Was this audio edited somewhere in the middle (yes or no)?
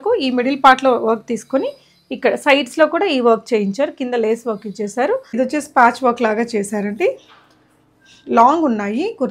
yes